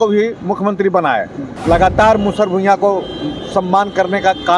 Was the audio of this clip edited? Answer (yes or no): yes